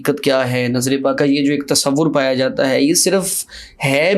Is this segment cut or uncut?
cut